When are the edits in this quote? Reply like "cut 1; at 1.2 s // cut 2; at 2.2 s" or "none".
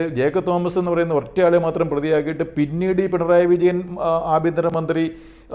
none